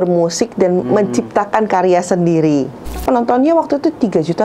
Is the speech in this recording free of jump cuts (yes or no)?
no